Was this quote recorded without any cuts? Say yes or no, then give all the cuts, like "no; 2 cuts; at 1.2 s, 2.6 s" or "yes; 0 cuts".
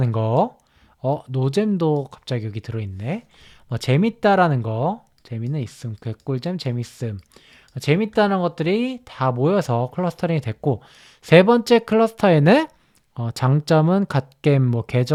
yes; 0 cuts